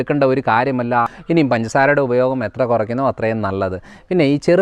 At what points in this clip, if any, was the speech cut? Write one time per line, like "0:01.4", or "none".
0:01.1